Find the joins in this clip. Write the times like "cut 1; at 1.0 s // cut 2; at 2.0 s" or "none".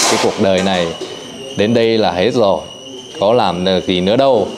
none